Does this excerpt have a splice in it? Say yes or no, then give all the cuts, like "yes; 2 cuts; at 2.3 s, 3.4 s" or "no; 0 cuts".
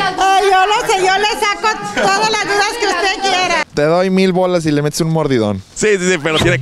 yes; 2 cuts; at 3.6 s, 5.7 s